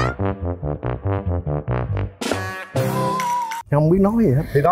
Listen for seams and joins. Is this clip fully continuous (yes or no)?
no